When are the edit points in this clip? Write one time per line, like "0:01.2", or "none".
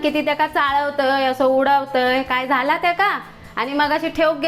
none